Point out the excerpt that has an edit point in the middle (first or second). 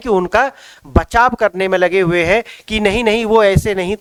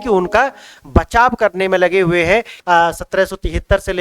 second